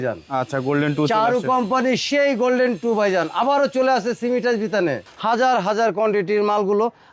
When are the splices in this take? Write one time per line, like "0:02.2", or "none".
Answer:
0:05.1